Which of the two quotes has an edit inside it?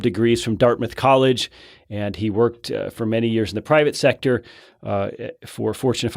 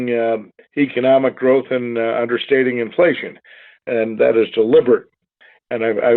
second; 1 cut; at 4.0 s

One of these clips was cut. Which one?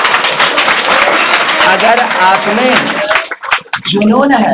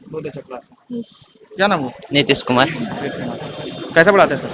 second; 1 cut; at 1.5 s

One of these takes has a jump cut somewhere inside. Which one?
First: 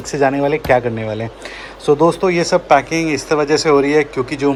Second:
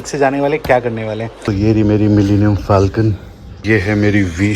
second; 2 cuts; at 1.4 s, 3.6 s

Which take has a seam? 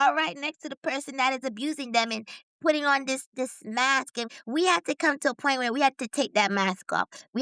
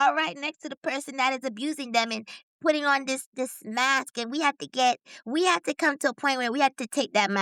first; 1 cut; at 4.3 s

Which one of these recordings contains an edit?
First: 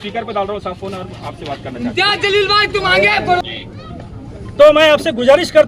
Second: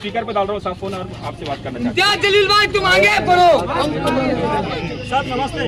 first; 1 cut; at 3.4 s

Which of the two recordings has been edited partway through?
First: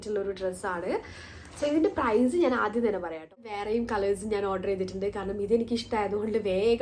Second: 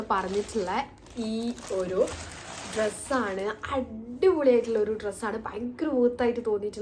first; 1 cut; at 3.5 s

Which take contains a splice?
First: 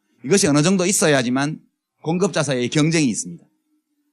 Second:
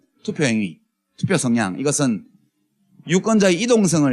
first; 1 cut; at 1.2 s

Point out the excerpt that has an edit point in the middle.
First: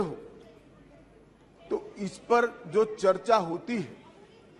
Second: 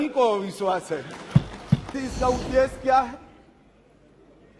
second; 1 cut; at 1.9 s

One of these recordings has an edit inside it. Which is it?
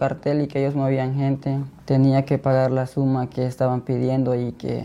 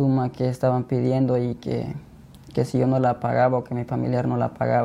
first; 1 cut; at 1.7 s

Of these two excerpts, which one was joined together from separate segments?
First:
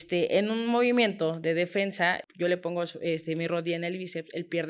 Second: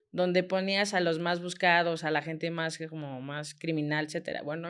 first; 1 cut; at 2.2 s

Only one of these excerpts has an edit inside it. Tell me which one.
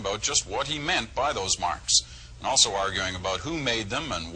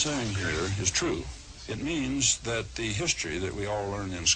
first; 1 cut; at 2.1 s

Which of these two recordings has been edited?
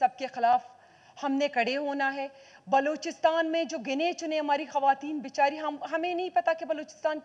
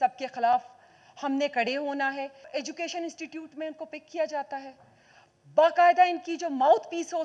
second; 1 cut; at 2.5 s

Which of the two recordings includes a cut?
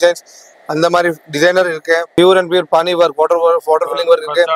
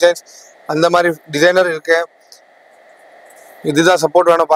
first; 1 cut; at 2.2 s

